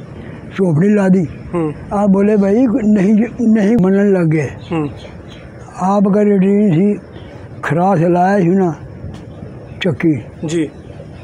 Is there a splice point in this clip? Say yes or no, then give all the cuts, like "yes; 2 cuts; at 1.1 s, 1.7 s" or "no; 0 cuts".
yes; 1 cut; at 3.8 s